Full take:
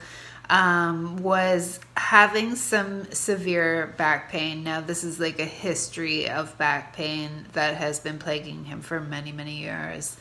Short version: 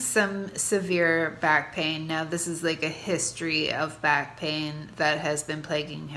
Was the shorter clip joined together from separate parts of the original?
no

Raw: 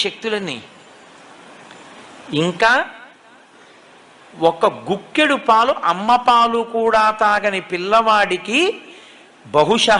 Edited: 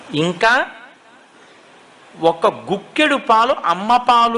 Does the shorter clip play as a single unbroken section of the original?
yes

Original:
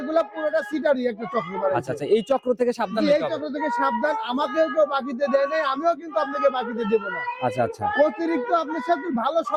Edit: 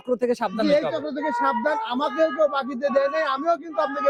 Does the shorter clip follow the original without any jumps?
yes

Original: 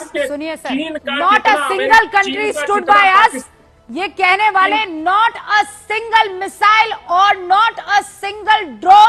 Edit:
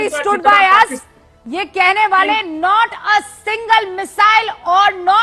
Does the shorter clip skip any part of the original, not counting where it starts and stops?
no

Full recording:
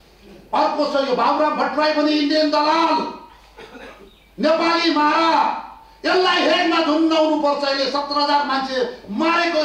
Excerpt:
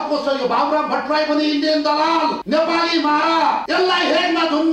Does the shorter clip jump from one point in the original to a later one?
yes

